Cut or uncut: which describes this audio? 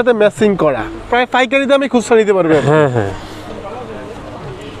uncut